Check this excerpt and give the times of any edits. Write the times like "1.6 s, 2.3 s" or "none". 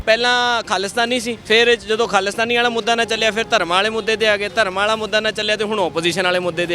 1.3 s